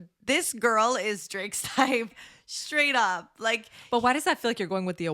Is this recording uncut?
no; 1 cut; at 2.1 s

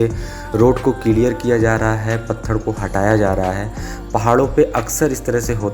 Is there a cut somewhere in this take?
no; 0 cuts

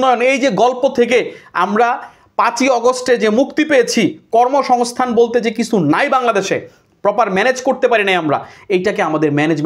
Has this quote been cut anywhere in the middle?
no; 0 cuts

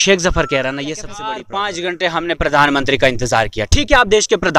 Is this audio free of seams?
no; 1 cut; at 1.2 s

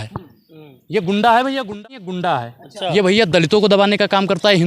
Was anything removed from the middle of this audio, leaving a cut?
yes; 1 cut; at 1.8 s

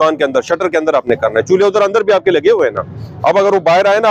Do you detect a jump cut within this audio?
no; 0 cuts

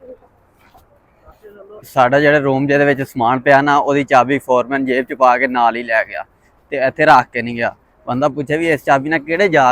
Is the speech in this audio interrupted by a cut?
yes; 1 cut; at 1.9 s

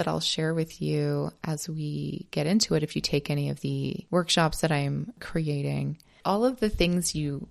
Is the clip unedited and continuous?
no; 3 cuts; at 4.0 s, 5.2 s, 6.1 s

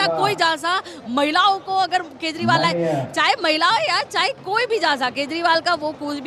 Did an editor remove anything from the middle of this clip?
no; 0 cuts

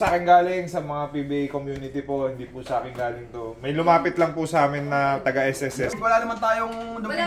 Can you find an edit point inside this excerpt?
yes; 1 cut; at 6.0 s

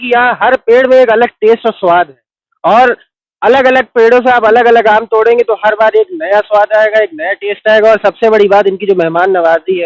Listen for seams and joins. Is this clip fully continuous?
yes; 0 cuts

